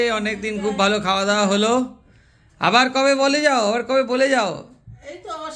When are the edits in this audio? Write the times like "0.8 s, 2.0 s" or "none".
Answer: none